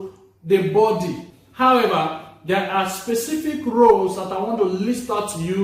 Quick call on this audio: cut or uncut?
cut